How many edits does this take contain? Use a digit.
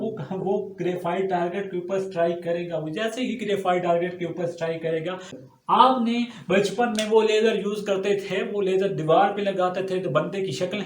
1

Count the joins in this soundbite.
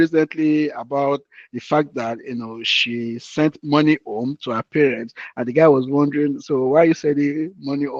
0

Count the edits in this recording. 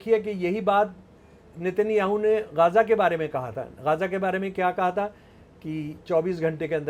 0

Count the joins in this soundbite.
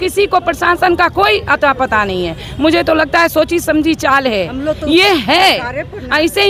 0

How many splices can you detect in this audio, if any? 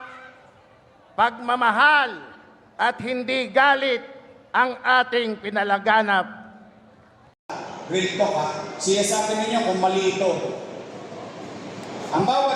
1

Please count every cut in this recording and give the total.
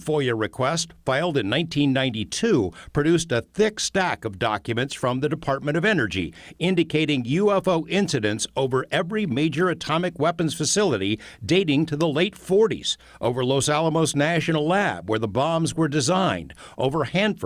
0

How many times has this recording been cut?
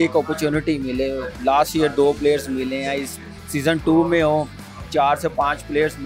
0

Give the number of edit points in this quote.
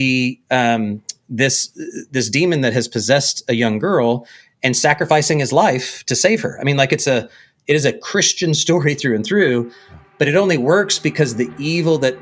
0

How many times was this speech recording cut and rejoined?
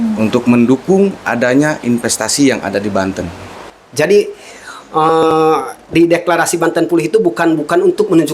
1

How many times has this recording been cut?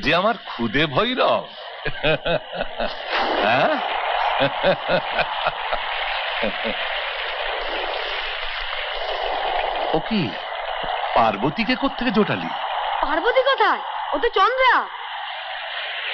0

